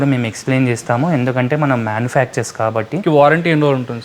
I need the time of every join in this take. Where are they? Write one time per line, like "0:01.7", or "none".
0:03.0